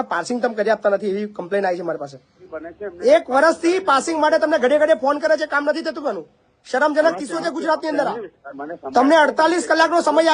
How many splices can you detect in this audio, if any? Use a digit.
2